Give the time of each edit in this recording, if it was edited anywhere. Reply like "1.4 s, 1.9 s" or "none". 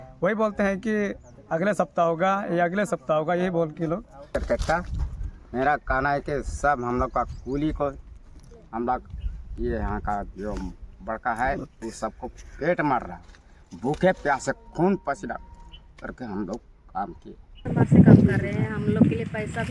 4.3 s, 17.6 s